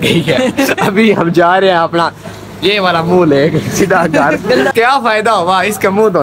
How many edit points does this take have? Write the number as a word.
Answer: one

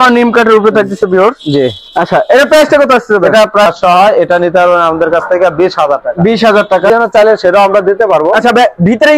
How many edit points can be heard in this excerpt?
two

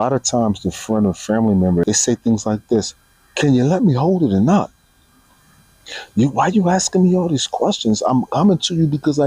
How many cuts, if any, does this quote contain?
one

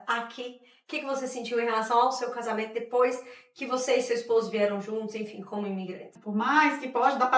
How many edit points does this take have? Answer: one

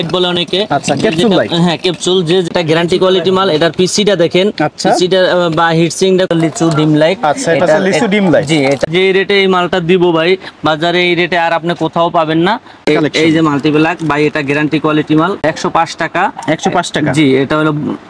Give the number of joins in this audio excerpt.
five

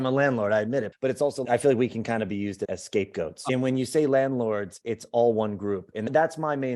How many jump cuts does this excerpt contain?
two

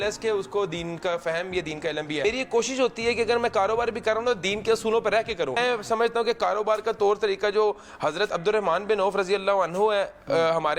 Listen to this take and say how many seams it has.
two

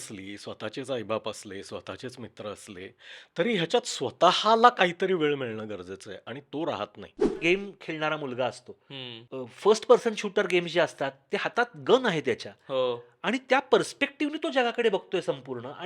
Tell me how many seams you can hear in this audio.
one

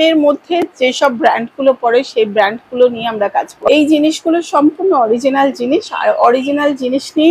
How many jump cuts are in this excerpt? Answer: one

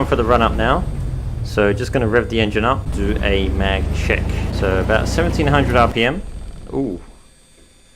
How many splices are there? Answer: two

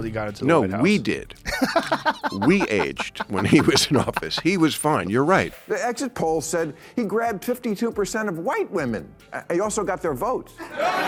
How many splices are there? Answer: zero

